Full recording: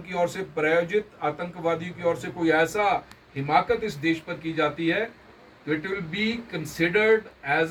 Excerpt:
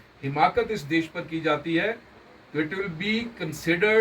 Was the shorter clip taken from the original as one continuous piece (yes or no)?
yes